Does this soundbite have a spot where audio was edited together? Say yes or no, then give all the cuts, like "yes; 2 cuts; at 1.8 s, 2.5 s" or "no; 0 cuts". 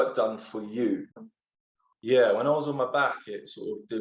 yes; 1 cut; at 1.1 s